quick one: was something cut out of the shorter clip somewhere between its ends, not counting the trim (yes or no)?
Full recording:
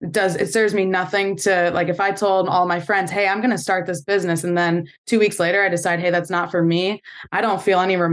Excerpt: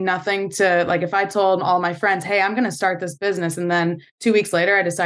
no